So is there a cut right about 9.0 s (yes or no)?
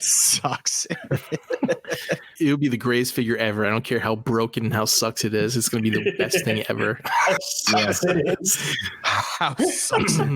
no